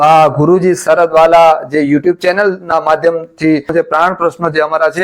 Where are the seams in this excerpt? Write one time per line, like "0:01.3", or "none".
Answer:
0:03.7

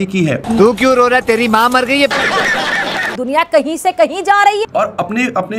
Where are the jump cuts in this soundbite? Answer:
0:03.1

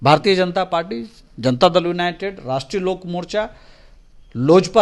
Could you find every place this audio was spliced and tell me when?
none

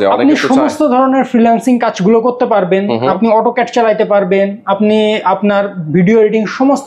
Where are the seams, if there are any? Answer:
none

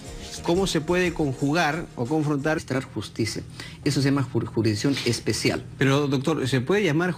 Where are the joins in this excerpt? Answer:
none

